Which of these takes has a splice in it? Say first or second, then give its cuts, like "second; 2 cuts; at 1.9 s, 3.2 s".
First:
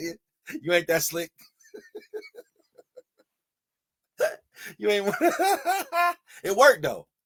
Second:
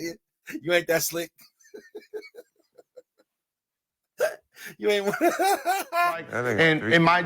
second; 1 cut; at 6.3 s